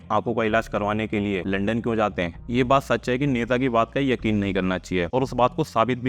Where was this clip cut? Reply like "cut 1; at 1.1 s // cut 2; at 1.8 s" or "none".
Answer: cut 1; at 1.4 s // cut 2; at 2.4 s // cut 3; at 5.1 s